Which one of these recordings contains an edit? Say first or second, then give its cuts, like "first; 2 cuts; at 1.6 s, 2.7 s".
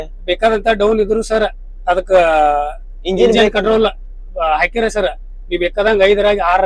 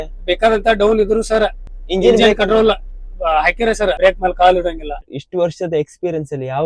second; 3 cuts; at 1.7 s, 4.0 s, 5.2 s